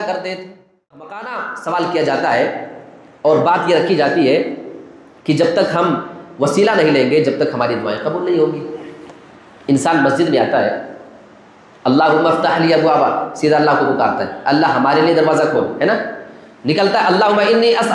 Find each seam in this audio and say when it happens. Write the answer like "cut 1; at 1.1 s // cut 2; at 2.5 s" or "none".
cut 1; at 1.0 s